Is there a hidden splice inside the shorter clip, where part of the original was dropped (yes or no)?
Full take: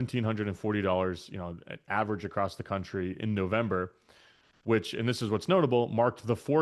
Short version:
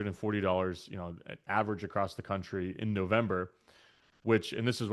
no